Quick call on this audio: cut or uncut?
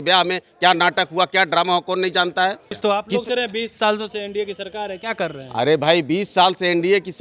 cut